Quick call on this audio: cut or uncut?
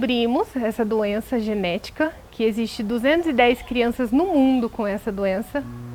uncut